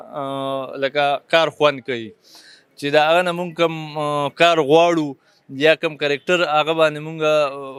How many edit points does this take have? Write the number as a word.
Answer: zero